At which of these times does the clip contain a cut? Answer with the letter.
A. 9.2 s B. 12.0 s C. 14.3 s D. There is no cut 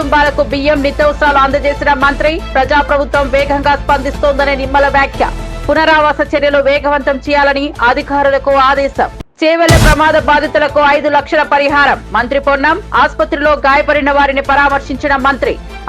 A